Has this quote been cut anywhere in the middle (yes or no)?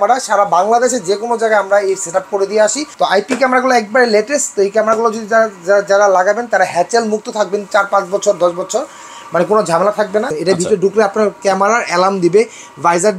yes